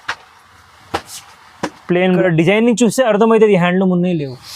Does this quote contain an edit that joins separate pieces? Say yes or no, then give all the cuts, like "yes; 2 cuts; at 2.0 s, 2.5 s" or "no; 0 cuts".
yes; 1 cut; at 2.2 s